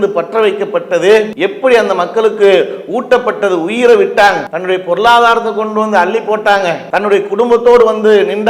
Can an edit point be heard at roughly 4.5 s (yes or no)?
yes